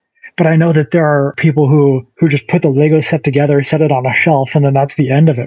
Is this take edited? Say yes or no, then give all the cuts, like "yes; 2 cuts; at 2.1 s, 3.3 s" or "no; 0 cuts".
yes; 2 cuts; at 1.3 s, 2.1 s